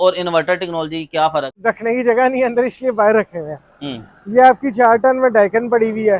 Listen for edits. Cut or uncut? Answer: cut